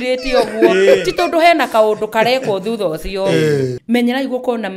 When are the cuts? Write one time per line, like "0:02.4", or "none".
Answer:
0:03.7